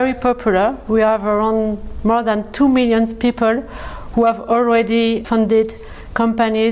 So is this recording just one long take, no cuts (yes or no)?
yes